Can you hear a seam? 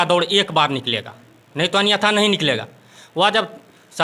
no; 0 cuts

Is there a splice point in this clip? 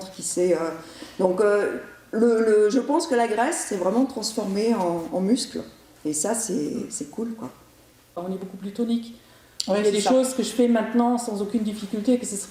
yes; 1 cut; at 8.2 s

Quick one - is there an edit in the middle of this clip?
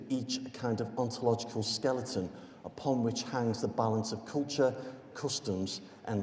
yes; 1 cut; at 0.9 s

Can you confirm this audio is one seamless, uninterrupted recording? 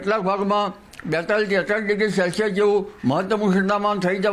yes; 0 cuts

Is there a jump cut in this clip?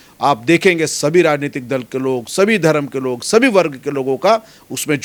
no; 0 cuts

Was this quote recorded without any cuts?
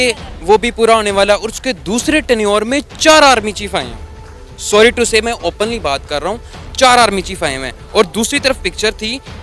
yes; 0 cuts

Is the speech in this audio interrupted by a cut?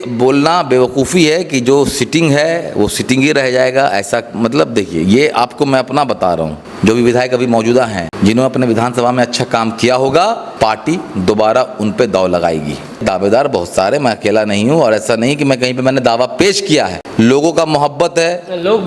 yes; 5 cuts; at 6.6 s, 8.0 s, 10.5 s, 13.0 s, 17.0 s

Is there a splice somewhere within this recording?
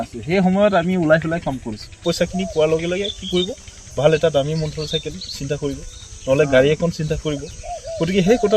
yes; 1 cut; at 2.0 s

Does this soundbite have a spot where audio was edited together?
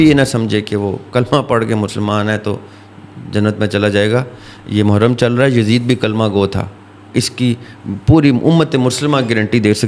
no; 0 cuts

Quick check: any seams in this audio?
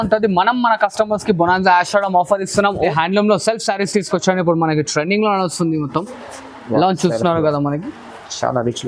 yes; 1 cut; at 2.9 s

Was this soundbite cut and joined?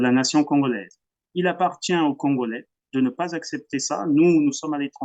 no; 0 cuts

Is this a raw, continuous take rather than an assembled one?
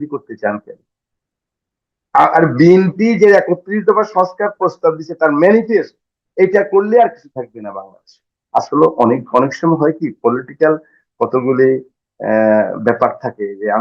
yes; 0 cuts

